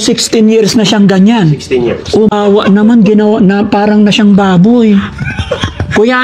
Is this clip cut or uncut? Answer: cut